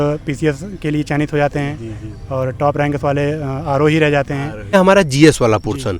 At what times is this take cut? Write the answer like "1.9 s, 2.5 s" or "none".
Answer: 4.7 s

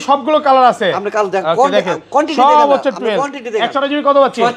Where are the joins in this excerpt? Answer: none

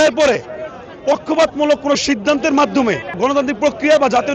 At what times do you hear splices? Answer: 3.2 s

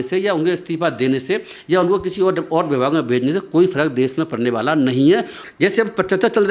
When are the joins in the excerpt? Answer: 5.4 s

